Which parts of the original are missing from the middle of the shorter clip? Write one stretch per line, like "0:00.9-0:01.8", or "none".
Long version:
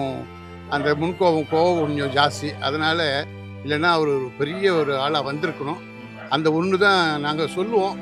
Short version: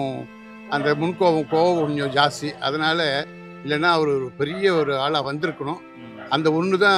none